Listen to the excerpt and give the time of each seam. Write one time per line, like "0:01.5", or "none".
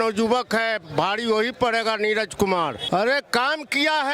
0:02.8

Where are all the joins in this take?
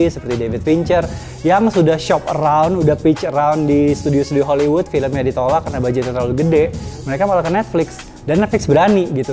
none

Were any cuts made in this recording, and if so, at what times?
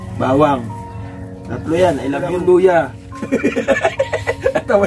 0:02.3

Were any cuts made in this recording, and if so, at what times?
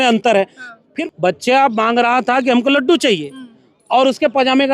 0:01.0

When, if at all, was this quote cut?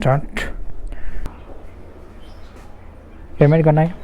0:01.3

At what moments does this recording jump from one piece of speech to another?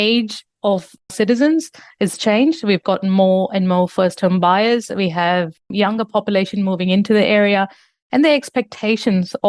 0:01.1

